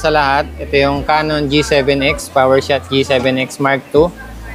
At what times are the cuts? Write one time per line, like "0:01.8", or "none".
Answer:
none